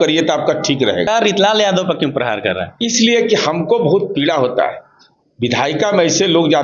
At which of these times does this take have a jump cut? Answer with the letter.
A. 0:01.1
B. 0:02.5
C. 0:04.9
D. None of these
A